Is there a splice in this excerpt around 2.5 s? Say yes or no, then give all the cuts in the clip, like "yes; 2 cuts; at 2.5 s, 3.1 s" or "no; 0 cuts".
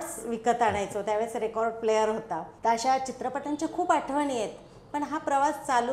yes; 1 cut; at 2.5 s